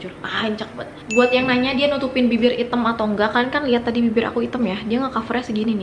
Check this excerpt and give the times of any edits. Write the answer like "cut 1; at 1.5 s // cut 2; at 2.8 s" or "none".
cut 1; at 1.0 s